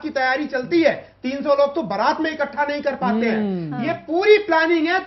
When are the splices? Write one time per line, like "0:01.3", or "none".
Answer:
none